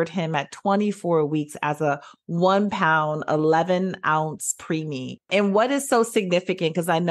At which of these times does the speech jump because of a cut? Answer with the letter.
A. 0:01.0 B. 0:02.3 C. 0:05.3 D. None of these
C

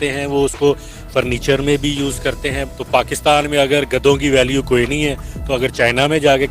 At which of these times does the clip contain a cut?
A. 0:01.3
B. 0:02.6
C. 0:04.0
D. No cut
B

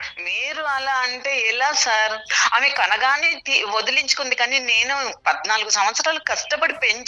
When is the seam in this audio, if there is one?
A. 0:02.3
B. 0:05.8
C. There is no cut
A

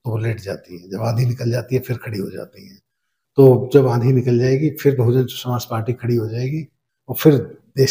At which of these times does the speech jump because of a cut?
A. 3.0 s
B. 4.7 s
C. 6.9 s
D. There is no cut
D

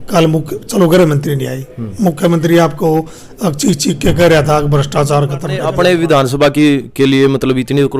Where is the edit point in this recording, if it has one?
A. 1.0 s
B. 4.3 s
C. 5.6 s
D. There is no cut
C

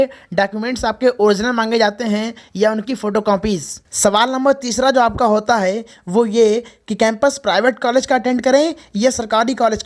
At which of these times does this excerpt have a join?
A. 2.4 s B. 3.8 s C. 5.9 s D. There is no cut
B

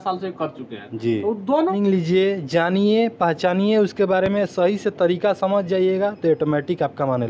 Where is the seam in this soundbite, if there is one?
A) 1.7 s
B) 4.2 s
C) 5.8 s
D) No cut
A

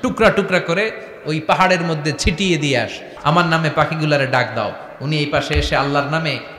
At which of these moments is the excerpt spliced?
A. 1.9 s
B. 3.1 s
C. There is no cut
B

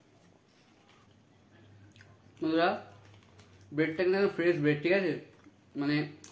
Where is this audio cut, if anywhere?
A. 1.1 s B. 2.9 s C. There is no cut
A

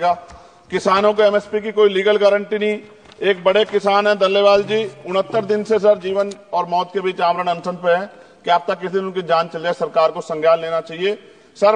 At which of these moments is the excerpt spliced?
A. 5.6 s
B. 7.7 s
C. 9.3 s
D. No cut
D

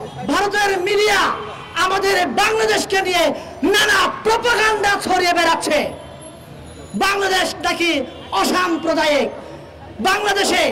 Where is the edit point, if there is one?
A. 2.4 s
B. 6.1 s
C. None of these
C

